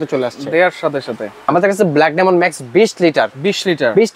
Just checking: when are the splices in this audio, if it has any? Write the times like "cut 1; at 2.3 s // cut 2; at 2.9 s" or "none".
cut 1; at 1.3 s